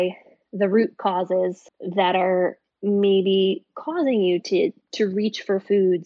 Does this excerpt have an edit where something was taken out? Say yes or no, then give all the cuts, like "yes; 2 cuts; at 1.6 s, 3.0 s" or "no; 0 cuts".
no; 0 cuts